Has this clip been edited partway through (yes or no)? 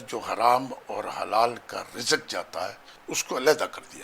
yes